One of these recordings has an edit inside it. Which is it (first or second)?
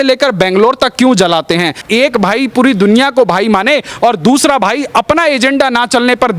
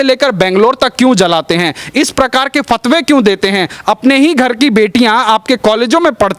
first